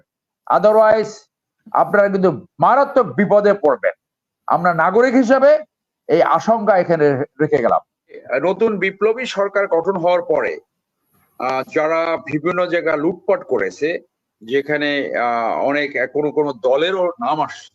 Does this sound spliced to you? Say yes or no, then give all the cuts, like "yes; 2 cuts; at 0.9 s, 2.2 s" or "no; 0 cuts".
no; 0 cuts